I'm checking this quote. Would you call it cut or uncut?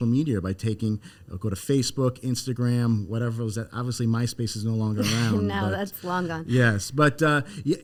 uncut